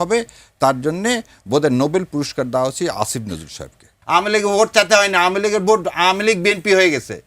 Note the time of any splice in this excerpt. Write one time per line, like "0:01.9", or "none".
0:03.9